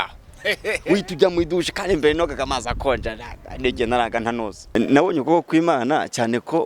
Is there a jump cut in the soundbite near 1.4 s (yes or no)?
no